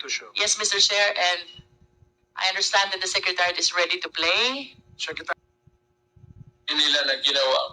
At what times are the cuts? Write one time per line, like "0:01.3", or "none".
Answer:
0:05.3